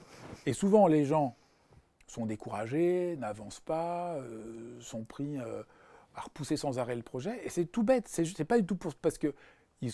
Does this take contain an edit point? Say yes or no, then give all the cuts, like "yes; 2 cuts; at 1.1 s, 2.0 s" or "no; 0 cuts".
no; 0 cuts